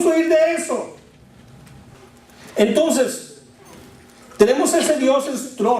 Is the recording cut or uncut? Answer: cut